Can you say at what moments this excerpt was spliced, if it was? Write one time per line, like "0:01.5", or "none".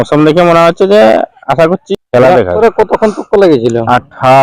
0:01.8
0:02.6